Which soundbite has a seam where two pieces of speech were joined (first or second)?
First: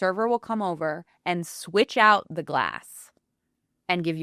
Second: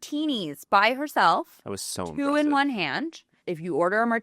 second